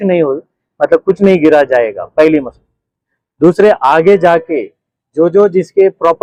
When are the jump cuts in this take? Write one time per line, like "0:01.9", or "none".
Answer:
none